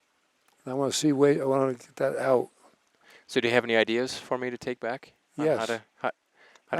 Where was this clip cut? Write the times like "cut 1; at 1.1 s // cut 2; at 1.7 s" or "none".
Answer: none